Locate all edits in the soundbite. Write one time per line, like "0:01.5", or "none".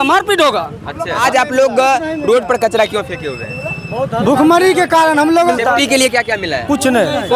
0:01.2
0:05.3